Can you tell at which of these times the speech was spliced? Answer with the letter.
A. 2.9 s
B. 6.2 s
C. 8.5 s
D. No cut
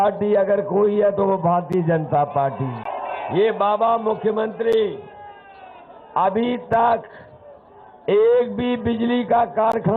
A